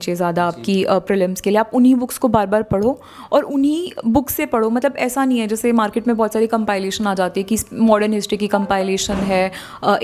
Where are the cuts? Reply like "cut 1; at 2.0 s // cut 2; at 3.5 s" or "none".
none